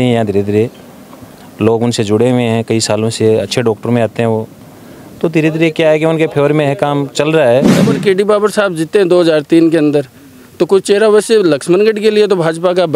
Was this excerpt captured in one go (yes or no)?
no